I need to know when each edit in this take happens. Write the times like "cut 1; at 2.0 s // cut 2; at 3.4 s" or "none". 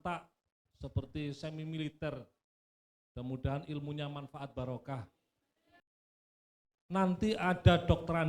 cut 1; at 6.4 s